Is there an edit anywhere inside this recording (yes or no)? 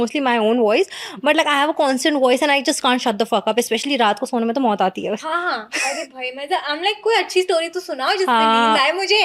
no